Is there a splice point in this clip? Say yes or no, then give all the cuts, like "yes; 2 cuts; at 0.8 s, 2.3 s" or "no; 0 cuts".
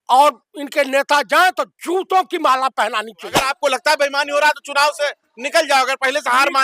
yes; 1 cut; at 3.5 s